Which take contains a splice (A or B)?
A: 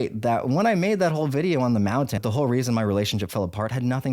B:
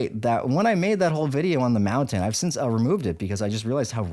A